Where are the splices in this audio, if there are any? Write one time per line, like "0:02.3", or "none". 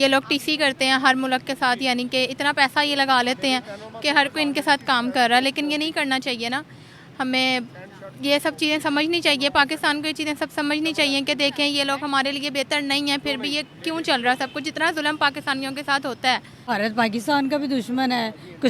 0:16.7